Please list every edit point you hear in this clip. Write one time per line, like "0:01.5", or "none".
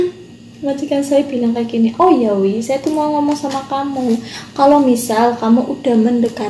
none